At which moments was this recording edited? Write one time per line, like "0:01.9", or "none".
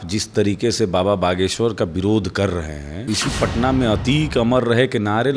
0:03.1